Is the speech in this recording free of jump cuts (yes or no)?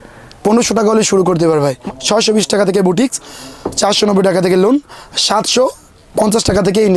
no